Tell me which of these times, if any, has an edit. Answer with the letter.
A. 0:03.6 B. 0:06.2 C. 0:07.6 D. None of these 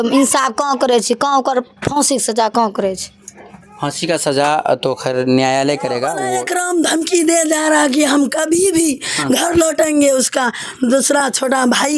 B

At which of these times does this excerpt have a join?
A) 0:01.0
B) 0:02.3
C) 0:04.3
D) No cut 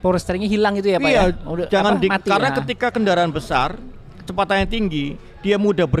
D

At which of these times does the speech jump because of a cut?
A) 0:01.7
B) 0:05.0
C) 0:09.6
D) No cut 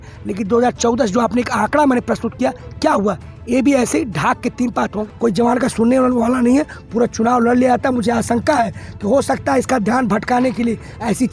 B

